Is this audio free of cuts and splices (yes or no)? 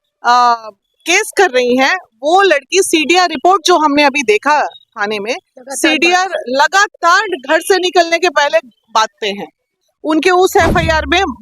no